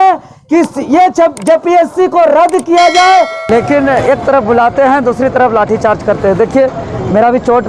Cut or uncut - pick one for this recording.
cut